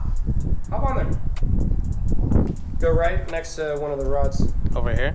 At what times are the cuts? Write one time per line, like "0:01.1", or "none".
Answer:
none